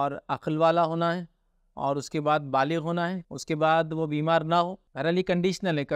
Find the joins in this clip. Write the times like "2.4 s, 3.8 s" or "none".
3.3 s, 4.8 s